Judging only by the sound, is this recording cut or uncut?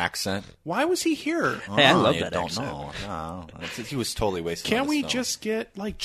uncut